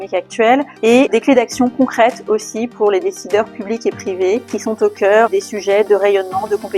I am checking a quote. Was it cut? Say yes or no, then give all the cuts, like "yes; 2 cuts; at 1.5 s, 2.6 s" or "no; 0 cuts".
yes; 1 cut; at 4.5 s